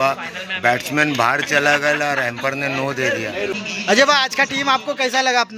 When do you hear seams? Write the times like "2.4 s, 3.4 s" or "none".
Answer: 3.6 s